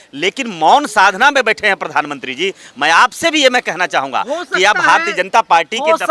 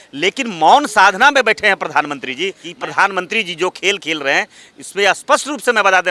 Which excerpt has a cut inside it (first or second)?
second